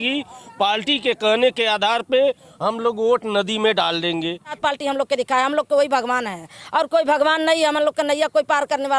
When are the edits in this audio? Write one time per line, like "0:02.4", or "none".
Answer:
0:04.6